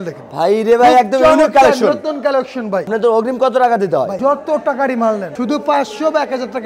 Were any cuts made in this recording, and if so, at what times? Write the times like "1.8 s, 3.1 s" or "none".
2.9 s, 4.2 s, 5.3 s